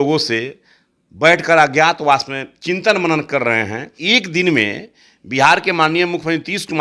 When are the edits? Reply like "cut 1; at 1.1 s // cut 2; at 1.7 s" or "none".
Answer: cut 1; at 3.9 s